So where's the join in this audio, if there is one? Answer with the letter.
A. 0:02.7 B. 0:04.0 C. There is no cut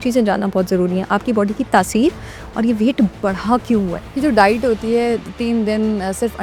B